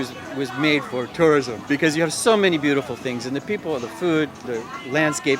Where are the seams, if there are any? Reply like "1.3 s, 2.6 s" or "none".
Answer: 1.6 s